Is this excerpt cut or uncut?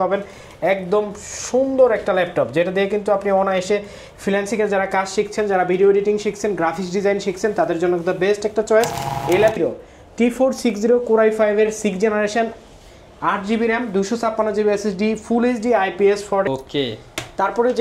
cut